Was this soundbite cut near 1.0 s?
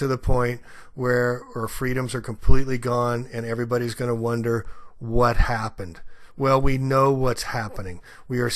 no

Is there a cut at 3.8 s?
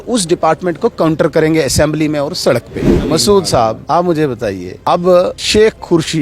yes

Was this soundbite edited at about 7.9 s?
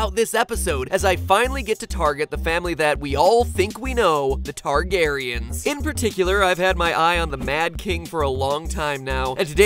no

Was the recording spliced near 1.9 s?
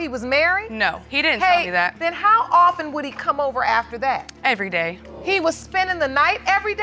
yes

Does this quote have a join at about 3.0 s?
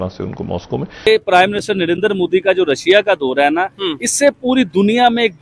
no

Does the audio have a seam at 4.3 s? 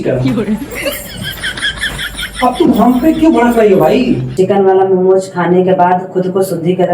yes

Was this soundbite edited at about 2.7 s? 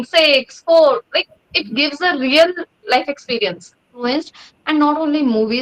no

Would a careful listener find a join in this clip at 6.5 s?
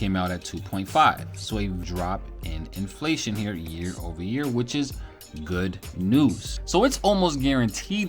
yes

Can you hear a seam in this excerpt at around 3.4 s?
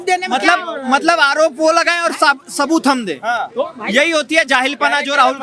no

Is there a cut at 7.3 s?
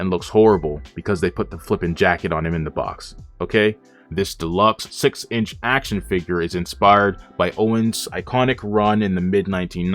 no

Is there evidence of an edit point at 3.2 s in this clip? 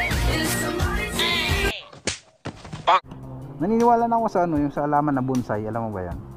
yes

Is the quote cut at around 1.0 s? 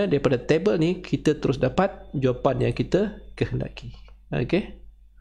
no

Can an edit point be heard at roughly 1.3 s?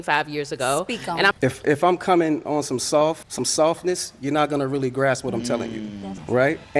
yes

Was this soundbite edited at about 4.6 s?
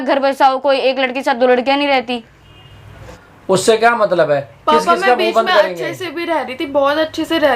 no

